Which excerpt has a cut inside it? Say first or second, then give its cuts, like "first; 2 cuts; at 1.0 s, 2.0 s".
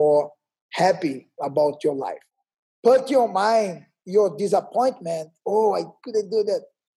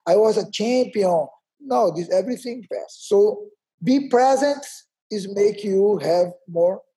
first; 1 cut; at 2.3 s